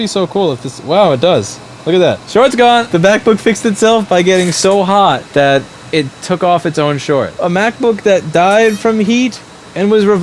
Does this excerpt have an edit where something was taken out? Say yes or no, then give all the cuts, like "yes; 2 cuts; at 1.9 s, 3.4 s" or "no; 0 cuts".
yes; 4 cuts; at 2.2 s, 2.9 s, 5.2 s, 7.3 s